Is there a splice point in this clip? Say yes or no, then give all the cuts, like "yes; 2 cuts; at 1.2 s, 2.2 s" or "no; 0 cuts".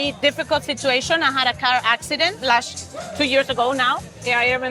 no; 0 cuts